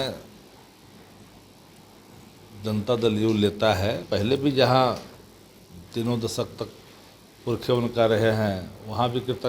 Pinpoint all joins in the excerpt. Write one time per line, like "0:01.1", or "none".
0:04.0